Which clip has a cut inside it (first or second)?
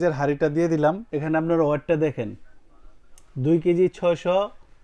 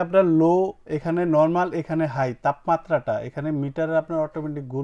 first